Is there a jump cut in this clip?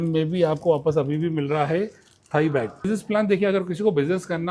yes; 1 cut; at 2.8 s

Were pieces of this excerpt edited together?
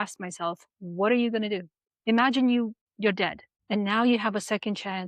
yes; 1 cut; at 1.8 s

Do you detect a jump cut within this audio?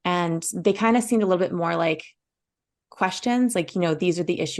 no; 0 cuts

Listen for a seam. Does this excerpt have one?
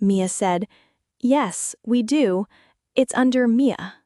no; 0 cuts

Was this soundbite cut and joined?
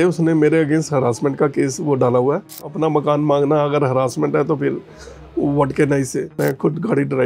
yes; 2 cuts; at 2.7 s, 6.2 s

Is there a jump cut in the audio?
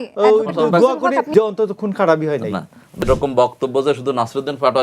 yes; 2 cuts; at 1.3 s, 3.0 s

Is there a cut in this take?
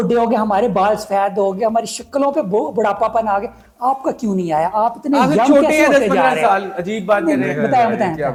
no; 0 cuts

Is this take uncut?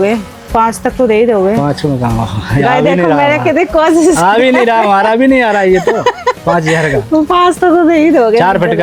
yes; 0 cuts

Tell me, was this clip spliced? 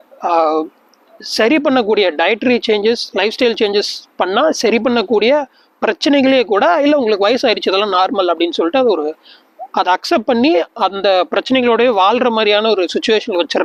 no; 0 cuts

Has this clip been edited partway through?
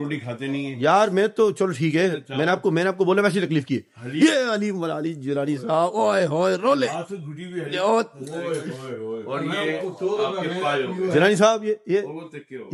no; 0 cuts

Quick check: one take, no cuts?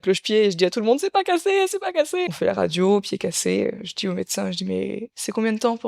no; 1 cut; at 2.3 s

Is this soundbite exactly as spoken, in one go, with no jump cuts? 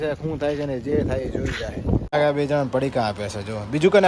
no; 1 cut; at 2.1 s

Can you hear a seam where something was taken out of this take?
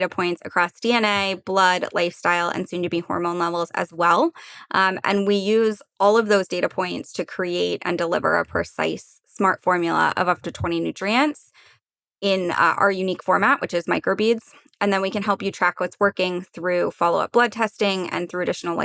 no; 0 cuts

